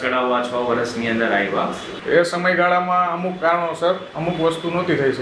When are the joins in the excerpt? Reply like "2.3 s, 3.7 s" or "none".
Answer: 1.9 s